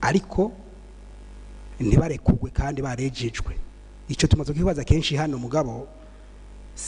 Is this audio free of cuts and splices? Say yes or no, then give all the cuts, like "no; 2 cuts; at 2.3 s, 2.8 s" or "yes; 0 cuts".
yes; 0 cuts